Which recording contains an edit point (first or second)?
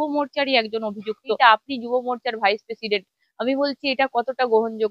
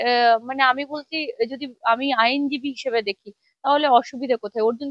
first